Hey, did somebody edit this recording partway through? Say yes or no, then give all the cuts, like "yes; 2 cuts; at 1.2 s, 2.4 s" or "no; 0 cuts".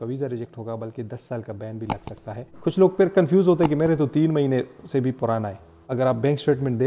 yes; 2 cuts; at 2.3 s, 5.4 s